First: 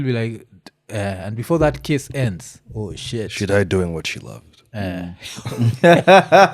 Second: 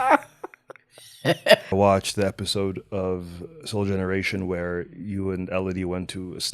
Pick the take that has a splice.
second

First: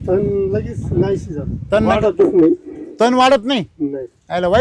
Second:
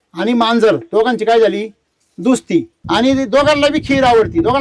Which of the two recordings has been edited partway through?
second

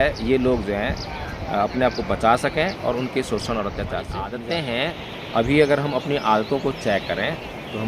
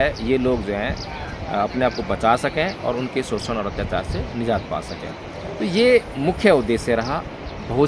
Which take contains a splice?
first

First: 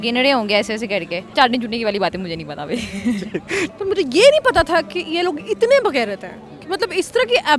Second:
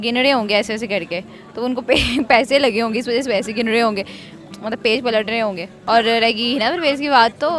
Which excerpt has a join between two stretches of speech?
first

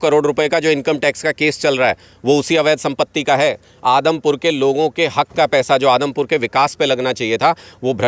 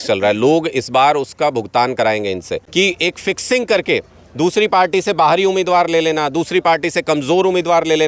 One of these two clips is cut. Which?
second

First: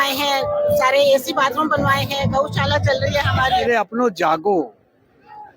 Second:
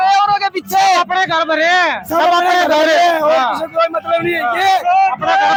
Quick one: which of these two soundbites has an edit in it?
first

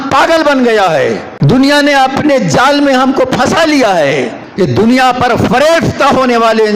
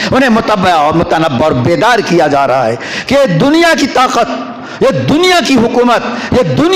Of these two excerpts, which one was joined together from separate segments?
first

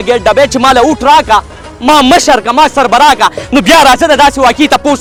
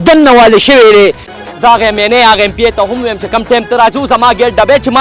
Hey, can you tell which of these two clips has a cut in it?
second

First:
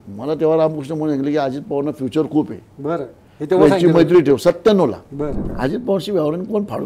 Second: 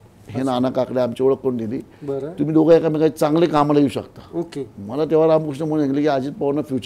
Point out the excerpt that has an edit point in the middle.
first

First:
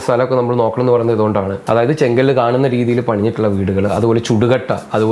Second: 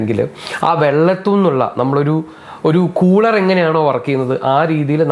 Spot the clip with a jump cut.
first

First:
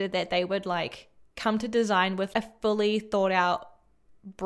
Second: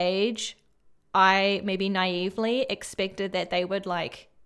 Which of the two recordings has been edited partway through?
first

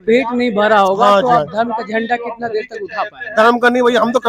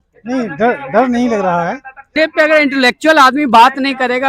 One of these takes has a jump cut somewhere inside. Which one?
second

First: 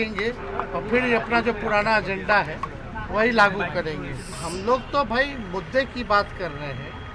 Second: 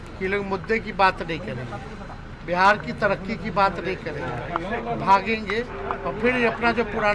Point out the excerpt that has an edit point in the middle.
first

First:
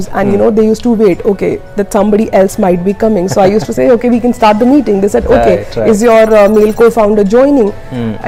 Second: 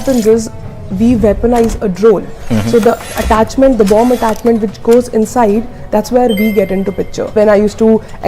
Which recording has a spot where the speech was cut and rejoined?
second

